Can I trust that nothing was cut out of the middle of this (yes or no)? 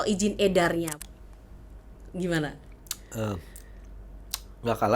no